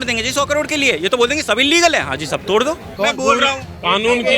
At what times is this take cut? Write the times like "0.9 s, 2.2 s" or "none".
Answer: 2.9 s